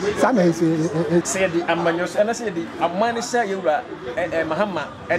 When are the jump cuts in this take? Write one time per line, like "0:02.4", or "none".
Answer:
0:01.3